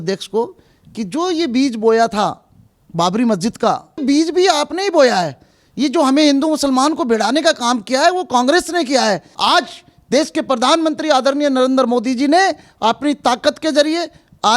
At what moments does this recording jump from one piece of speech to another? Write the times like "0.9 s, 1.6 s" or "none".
4.0 s, 9.3 s